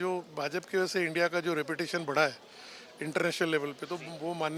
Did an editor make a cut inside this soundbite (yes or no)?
no